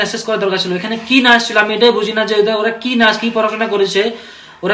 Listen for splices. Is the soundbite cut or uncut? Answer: uncut